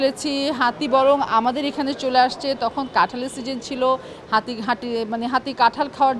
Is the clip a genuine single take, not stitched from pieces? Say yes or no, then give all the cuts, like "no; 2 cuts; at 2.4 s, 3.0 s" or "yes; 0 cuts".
yes; 0 cuts